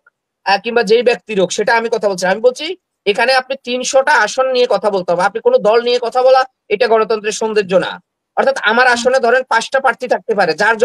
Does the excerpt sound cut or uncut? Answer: uncut